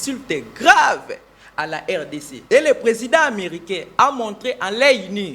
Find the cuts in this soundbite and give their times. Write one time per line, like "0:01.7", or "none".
0:02.3